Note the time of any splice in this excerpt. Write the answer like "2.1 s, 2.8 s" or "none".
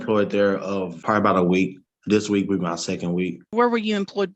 0.9 s, 1.9 s, 3.5 s